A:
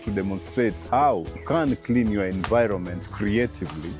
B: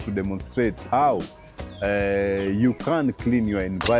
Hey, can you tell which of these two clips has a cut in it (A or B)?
A